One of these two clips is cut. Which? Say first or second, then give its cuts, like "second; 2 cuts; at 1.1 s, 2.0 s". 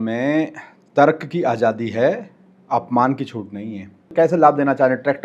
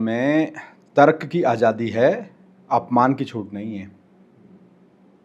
first; 1 cut; at 4.1 s